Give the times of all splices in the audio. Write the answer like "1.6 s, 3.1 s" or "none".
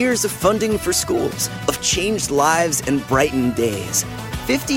none